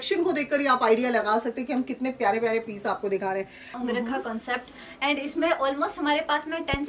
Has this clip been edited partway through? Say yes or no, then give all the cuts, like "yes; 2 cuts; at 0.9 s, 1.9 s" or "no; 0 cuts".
yes; 1 cut; at 3.7 s